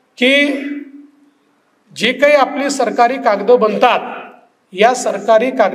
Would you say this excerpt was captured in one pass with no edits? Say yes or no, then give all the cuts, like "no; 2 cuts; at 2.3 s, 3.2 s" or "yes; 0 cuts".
yes; 0 cuts